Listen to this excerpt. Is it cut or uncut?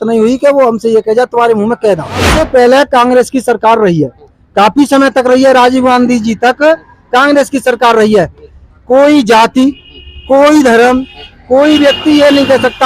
cut